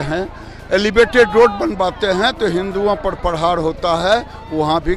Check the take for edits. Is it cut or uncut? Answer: uncut